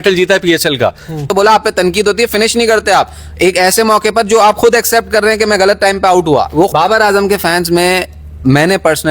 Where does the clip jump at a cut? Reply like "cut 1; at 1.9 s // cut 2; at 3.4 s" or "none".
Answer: cut 1; at 1.3 s // cut 2; at 6.7 s